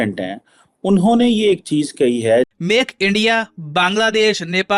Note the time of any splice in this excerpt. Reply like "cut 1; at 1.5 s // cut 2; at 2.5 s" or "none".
cut 1; at 2.5 s